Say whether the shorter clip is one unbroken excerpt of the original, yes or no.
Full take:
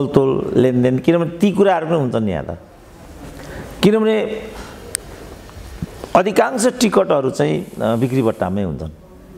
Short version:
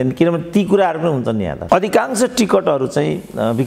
no